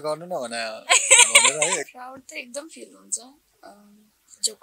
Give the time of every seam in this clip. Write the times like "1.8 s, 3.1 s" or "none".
1.9 s